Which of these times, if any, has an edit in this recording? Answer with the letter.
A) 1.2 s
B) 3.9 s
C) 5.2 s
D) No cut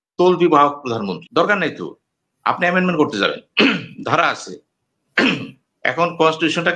A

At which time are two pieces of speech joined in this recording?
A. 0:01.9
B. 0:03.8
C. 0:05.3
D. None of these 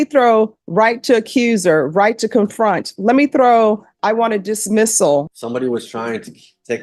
C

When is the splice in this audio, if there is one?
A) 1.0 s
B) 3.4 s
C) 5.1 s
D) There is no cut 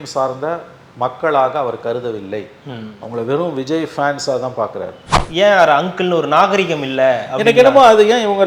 C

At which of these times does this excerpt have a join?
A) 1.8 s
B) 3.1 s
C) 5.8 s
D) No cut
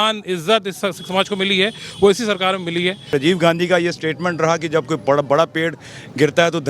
B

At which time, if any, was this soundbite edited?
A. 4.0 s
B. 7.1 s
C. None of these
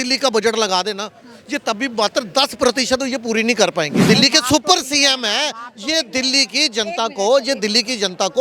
A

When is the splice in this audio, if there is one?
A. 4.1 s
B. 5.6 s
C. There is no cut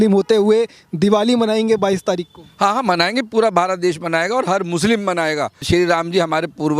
B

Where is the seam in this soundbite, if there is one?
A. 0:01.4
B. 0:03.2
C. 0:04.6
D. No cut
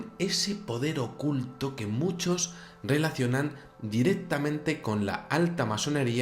C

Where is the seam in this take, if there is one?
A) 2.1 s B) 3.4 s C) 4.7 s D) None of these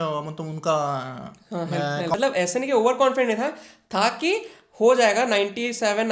A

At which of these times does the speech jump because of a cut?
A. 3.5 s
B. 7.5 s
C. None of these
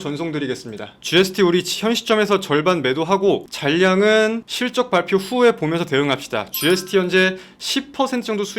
A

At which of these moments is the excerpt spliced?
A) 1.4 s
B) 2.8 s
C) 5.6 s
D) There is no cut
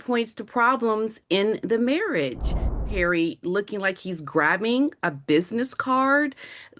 B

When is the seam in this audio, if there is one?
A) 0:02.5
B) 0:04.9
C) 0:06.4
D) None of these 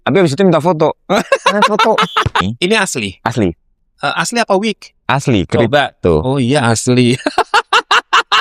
A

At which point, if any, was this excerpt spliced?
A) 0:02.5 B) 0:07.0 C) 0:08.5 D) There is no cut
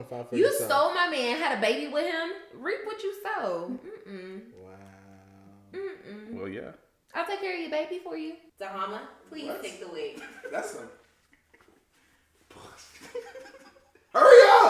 C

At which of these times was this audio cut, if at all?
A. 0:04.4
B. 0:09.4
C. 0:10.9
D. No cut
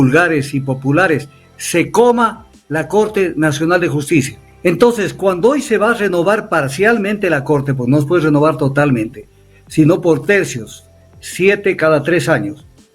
A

